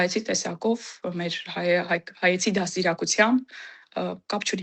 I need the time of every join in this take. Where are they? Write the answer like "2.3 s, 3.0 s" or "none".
none